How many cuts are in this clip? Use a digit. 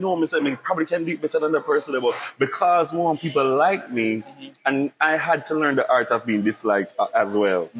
0